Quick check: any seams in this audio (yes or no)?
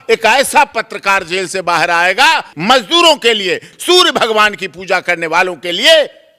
yes